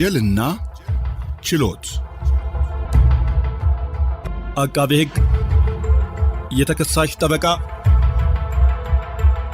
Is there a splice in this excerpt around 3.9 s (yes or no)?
no